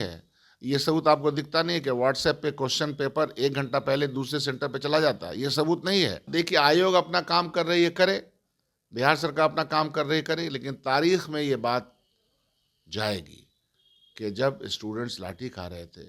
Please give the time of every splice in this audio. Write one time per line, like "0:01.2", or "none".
0:06.2